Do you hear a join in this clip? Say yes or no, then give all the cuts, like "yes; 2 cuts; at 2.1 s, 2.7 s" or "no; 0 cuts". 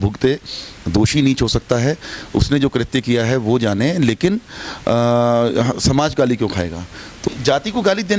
yes; 1 cut; at 7.2 s